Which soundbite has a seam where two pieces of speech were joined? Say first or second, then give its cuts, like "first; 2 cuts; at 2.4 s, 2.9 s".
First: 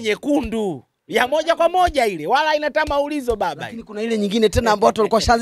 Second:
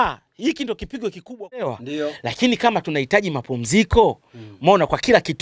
second; 1 cut; at 1.8 s